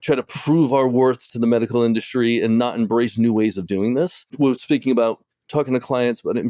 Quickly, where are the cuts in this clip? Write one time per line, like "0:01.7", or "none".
0:01.2
0:04.3

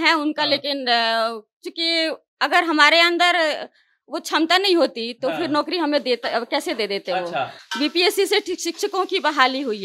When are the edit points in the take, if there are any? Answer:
none

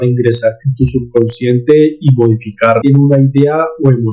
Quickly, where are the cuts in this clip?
0:02.8

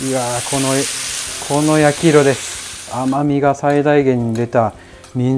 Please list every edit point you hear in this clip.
0:02.9

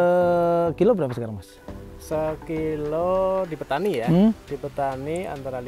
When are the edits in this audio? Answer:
none

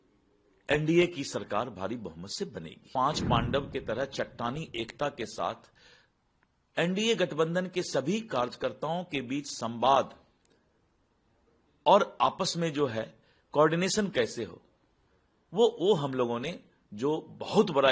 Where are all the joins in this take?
0:02.9

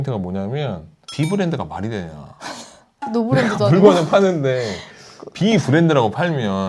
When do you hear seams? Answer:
none

